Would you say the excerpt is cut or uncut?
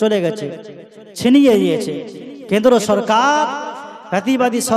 uncut